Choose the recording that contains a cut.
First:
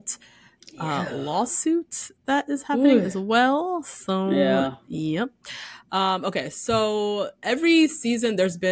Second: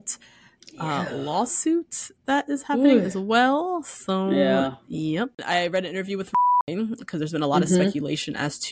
second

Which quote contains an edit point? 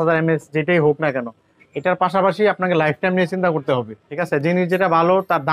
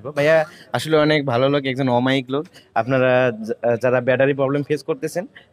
first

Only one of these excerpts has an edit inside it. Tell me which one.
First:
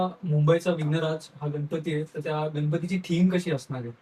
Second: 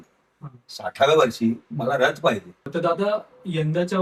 second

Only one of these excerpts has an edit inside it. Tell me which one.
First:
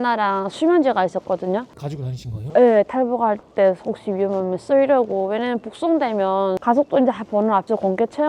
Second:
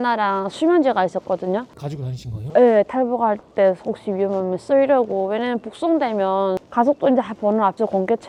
first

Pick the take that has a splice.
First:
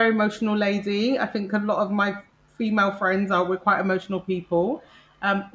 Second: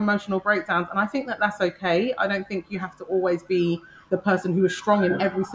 second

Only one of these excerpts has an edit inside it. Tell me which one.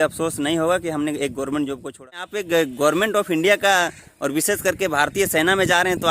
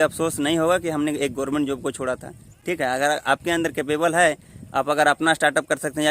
first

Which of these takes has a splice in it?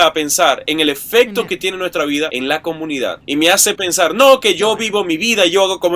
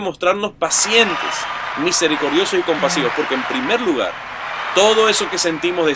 first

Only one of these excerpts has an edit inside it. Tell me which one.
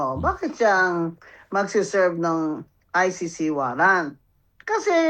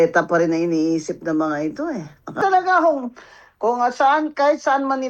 second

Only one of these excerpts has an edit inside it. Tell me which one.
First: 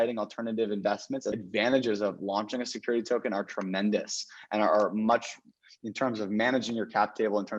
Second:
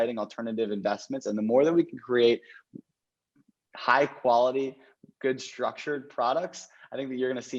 first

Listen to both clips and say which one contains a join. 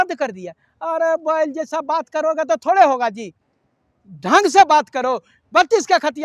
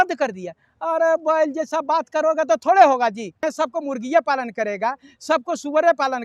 second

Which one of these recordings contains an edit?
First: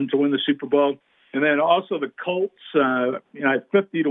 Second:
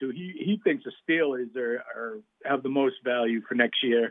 first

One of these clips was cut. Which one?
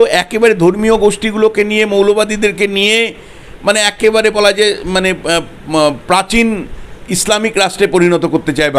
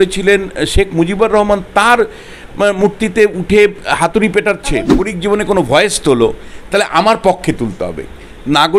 second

